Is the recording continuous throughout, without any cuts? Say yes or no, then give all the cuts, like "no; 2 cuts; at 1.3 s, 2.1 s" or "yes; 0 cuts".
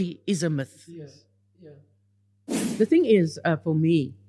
no; 1 cut; at 2.6 s